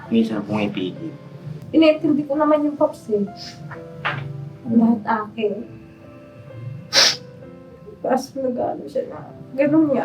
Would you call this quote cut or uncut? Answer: cut